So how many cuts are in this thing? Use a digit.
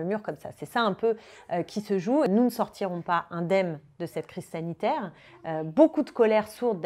1